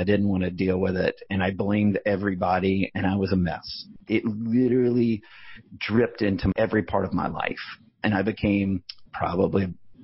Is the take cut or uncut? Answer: cut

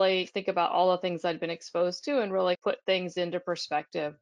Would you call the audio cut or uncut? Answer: uncut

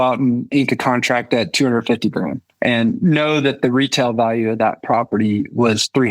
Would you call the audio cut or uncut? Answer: cut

